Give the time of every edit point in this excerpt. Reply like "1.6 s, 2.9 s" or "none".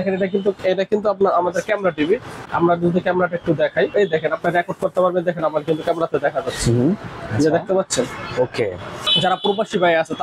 2.5 s, 3.9 s, 9.0 s

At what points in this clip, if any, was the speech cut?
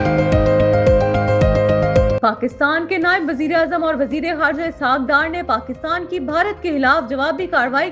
2.2 s

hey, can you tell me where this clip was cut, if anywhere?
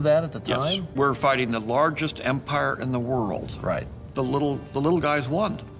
0.8 s, 3.9 s

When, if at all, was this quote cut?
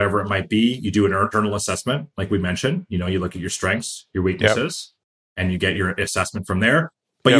none

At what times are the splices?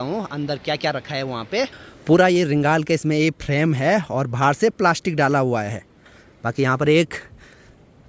none

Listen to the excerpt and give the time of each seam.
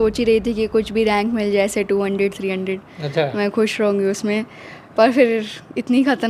none

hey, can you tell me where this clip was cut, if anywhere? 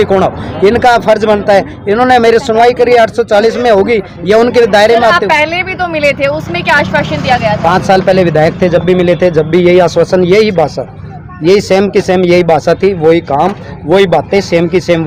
none

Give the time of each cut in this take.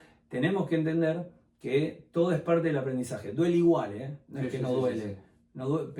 none

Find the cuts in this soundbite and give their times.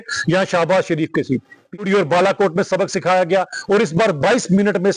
1.8 s

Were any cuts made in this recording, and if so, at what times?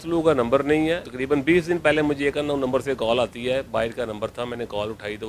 1.1 s

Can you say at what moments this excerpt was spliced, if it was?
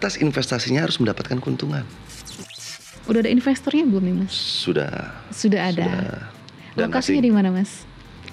2.5 s

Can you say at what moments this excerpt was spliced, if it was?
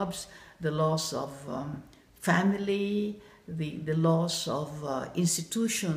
none

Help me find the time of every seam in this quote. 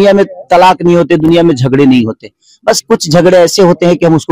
none

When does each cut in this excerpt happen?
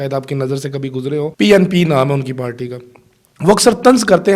1.3 s

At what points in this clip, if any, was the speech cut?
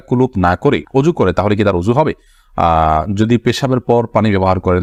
none

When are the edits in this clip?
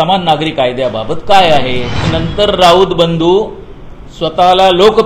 2.1 s

